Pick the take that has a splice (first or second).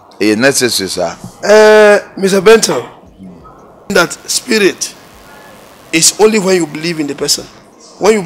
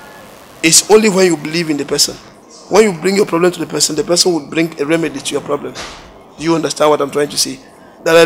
first